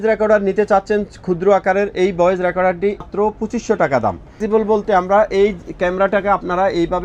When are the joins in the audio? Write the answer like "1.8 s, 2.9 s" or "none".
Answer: 3.1 s, 4.4 s